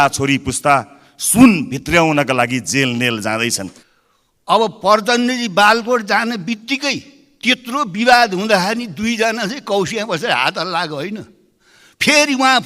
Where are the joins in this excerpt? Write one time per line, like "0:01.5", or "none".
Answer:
0:03.8